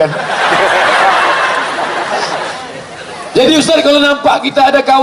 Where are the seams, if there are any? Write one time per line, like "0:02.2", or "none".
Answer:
0:02.5